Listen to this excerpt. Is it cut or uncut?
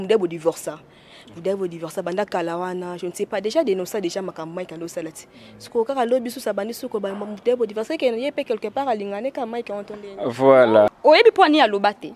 cut